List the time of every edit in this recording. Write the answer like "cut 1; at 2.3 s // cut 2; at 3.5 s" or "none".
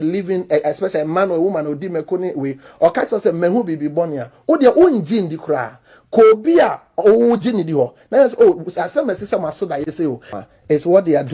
cut 1; at 10.3 s